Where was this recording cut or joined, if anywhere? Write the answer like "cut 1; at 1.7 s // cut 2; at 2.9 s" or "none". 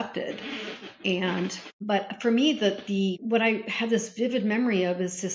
cut 1; at 1.7 s // cut 2; at 3.2 s